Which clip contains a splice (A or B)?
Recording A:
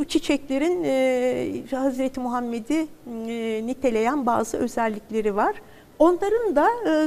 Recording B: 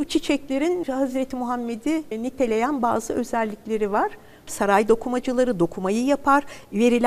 B